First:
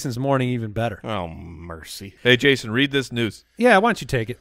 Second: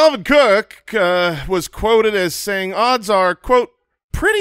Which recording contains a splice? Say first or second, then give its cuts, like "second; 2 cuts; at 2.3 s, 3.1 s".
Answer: first; 1 cut; at 2.1 s